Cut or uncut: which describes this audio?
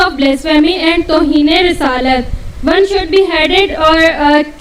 uncut